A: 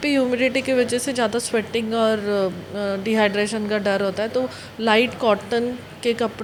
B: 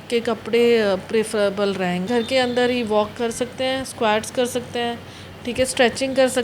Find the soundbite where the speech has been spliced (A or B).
B